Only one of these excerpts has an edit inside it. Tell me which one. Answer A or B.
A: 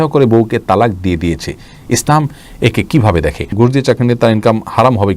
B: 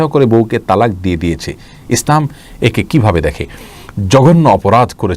A